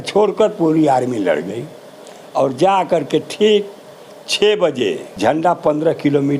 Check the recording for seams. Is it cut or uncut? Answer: cut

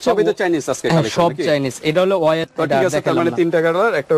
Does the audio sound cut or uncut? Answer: cut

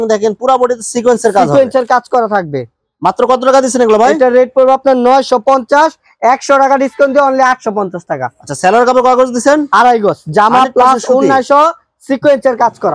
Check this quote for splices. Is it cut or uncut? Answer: uncut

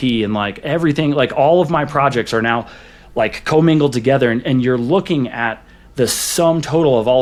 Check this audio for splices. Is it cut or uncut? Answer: uncut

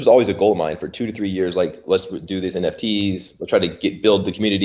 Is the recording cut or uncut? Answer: uncut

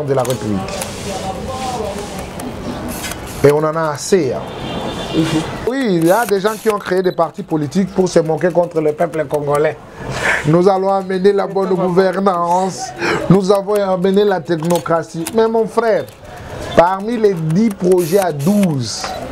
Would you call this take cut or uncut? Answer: cut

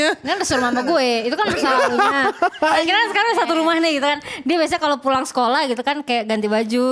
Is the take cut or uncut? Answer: uncut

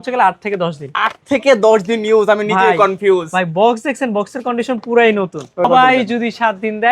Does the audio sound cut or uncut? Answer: cut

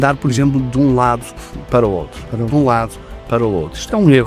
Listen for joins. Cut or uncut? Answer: uncut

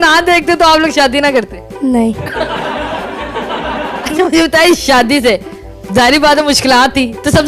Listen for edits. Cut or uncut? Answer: cut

